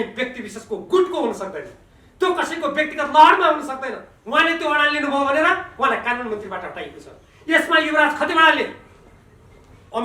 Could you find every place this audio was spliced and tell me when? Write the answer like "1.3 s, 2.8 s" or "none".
4.1 s